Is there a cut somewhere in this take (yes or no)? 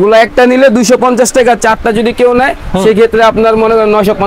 no